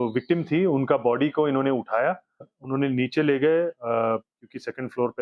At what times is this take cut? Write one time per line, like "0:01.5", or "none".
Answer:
0:02.5